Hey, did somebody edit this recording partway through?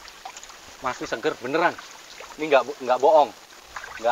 no; 0 cuts

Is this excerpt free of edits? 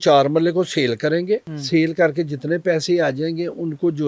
no; 1 cut; at 1.5 s

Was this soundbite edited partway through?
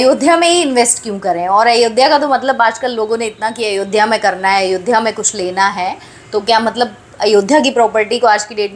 no; 0 cuts

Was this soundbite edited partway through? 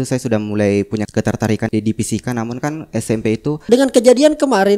yes; 2 cuts; at 1.6 s, 3.7 s

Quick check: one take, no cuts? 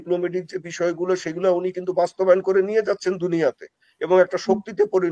yes; 0 cuts

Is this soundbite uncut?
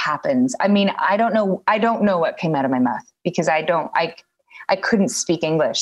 yes; 0 cuts

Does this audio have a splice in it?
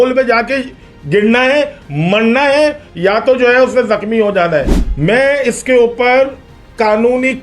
yes; 1 cut; at 4.8 s

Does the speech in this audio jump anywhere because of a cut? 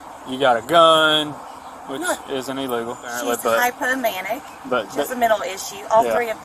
yes; 1 cut; at 3.1 s

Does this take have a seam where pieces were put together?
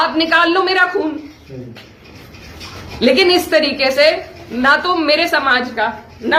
no; 0 cuts

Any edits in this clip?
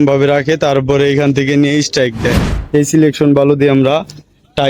yes; 1 cut; at 2.5 s

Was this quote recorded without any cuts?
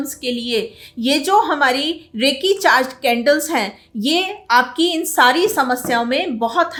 yes; 0 cuts

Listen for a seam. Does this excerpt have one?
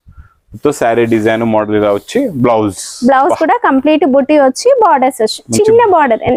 no; 0 cuts

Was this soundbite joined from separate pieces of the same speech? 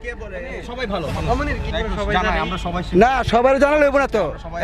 yes; 1 cut; at 1.7 s

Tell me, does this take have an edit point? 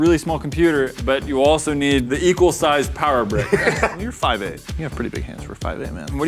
yes; 1 cut; at 4.0 s

